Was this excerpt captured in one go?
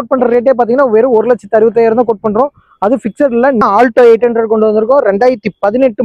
no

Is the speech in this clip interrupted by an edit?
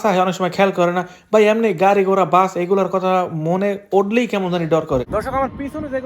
yes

